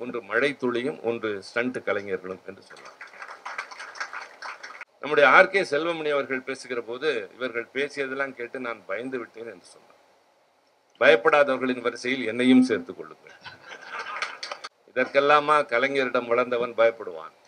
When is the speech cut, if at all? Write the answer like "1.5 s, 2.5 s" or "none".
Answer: 4.8 s, 14.7 s